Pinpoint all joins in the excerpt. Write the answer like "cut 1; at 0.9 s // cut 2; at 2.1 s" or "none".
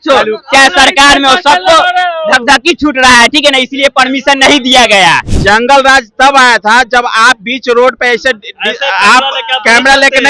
cut 1; at 5.3 s